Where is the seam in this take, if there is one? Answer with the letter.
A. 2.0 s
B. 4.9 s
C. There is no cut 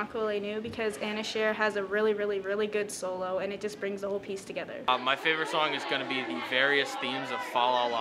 B